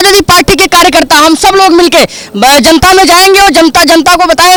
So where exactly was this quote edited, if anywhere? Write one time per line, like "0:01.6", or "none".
none